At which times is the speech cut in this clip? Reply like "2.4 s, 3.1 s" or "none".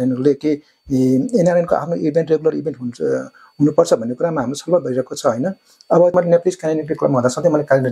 6.1 s